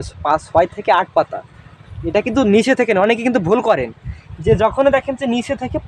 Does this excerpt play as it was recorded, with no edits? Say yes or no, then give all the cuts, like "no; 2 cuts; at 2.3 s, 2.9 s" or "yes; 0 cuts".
yes; 0 cuts